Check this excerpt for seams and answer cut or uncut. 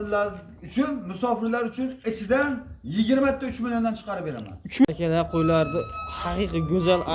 cut